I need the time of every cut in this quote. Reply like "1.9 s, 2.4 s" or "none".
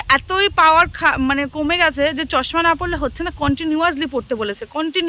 none